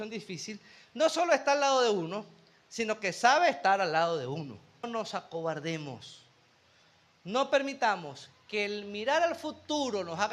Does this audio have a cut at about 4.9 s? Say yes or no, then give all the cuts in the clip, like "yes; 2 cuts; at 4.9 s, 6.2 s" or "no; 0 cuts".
yes; 1 cut; at 4.9 s